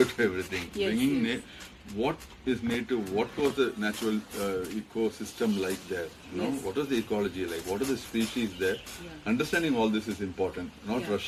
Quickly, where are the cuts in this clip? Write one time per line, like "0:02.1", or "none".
none

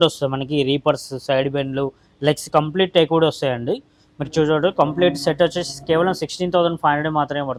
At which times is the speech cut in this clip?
none

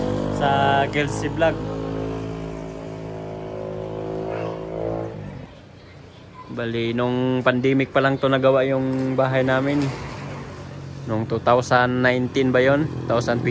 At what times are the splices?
0:05.4

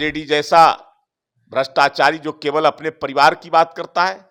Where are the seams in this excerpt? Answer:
none

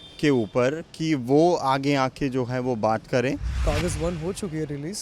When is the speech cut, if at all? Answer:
0:03.6

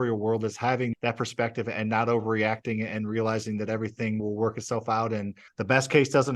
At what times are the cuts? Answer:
0:00.9
0:04.2
0:05.4

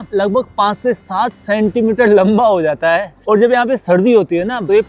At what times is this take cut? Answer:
none

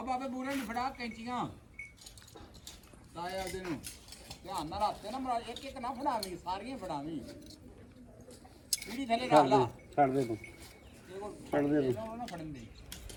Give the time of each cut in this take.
none

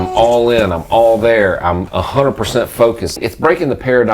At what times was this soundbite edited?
0:01.8
0:03.2

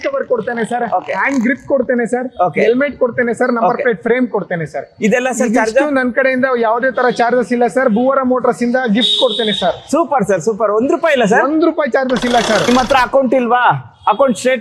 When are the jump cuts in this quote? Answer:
0:12.6

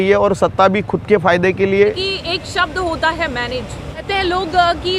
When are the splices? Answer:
0:01.8
0:04.1

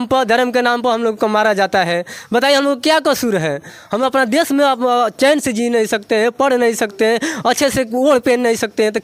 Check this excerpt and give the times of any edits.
none

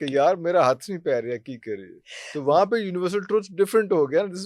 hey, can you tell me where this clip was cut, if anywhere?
none

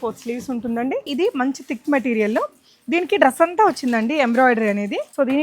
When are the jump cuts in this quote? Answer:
0:01.1

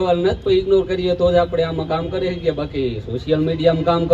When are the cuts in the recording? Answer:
none

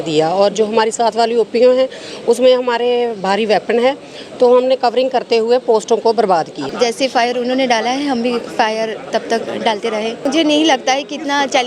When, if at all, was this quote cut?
0:06.6
0:10.3

